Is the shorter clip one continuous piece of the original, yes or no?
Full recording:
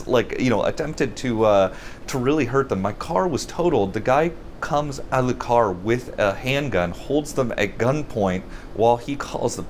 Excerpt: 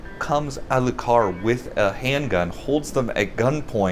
yes